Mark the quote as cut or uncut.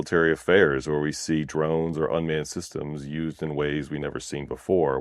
uncut